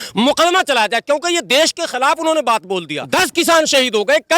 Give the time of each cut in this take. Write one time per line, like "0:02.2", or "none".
0:02.9